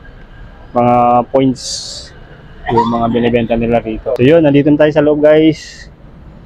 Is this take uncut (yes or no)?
no